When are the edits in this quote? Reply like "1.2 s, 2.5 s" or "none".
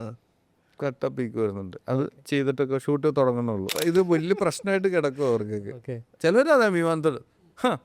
3.7 s